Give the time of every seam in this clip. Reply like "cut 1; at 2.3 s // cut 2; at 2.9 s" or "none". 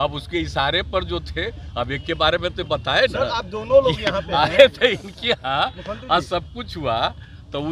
none